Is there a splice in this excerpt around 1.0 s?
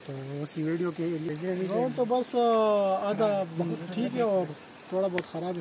yes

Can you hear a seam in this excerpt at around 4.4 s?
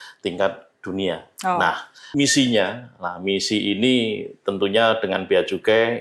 no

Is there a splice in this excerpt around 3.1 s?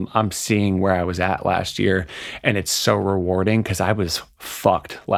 no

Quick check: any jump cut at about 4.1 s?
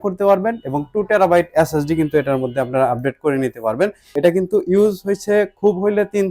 yes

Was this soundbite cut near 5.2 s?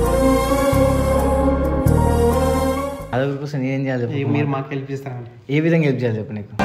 no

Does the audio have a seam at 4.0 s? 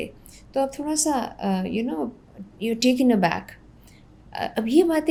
no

